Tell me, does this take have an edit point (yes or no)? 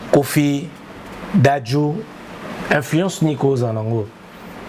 no